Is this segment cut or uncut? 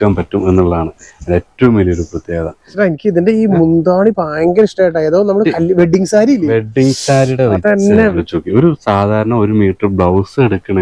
cut